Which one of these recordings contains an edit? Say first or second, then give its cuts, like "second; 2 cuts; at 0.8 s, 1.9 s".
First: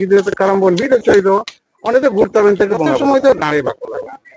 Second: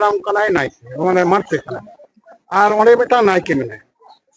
first; 1 cut; at 3.0 s